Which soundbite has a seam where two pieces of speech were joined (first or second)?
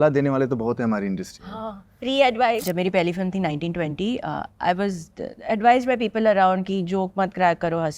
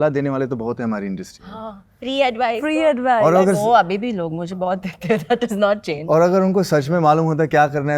first